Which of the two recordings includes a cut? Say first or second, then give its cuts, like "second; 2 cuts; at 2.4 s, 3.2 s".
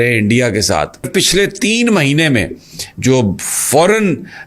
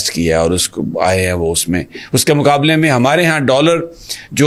first; 1 cut; at 1.1 s